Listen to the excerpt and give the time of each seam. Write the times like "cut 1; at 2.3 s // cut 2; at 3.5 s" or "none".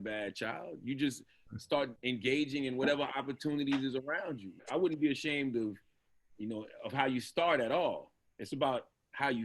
cut 1; at 2.0 s // cut 2; at 4.6 s